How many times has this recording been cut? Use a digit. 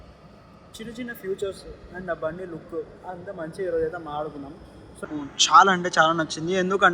1